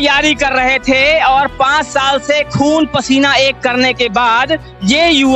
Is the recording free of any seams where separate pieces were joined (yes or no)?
yes